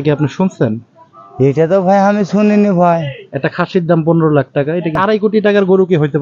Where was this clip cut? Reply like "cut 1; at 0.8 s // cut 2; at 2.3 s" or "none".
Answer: cut 1; at 4.9 s